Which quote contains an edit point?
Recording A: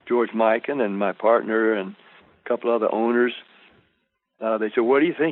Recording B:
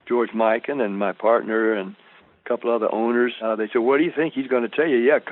B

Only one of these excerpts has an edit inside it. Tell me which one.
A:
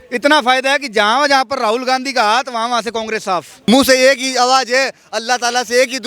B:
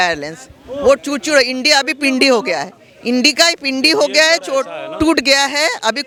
A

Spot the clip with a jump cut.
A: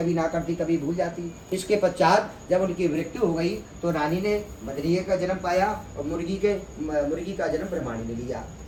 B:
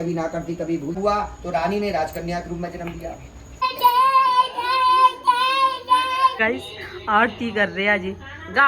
B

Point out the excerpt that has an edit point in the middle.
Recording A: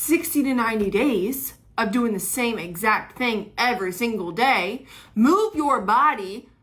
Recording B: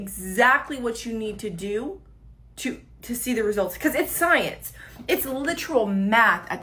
A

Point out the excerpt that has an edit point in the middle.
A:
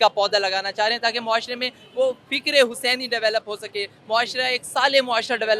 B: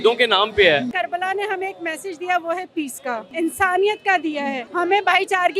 B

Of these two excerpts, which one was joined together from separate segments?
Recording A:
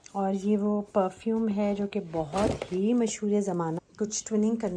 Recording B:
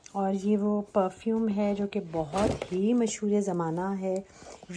A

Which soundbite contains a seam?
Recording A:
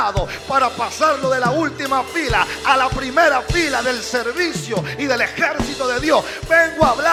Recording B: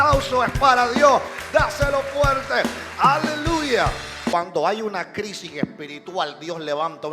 B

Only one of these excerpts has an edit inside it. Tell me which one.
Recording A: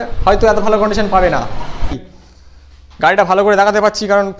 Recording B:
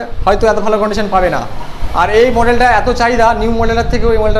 A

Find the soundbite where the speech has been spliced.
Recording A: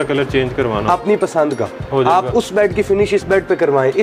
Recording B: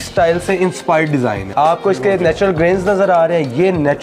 B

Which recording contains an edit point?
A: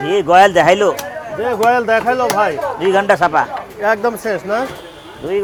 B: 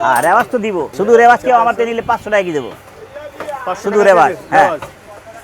B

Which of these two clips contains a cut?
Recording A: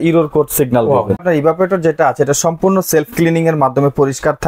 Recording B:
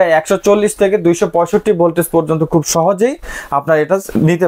A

